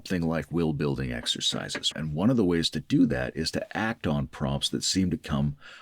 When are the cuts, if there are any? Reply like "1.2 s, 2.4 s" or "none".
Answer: 1.9 s